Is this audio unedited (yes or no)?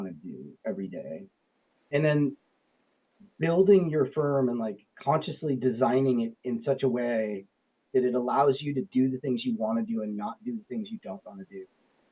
yes